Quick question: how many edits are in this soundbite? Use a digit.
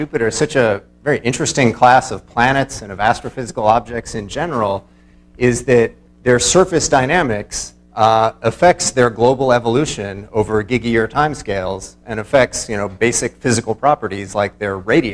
1